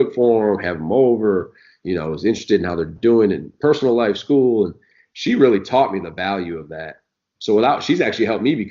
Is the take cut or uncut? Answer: cut